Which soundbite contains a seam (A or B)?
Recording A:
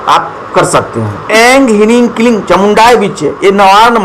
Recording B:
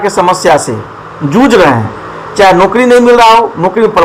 A